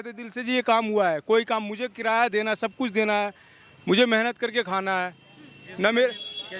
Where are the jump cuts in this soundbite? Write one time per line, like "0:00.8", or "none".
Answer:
none